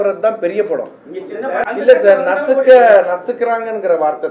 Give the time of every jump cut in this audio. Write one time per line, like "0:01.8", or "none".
0:01.6